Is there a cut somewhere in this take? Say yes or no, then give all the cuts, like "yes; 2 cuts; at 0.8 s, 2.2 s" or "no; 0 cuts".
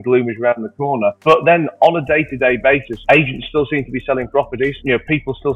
no; 0 cuts